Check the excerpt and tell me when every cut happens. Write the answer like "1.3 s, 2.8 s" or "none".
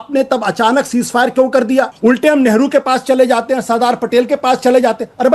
1.9 s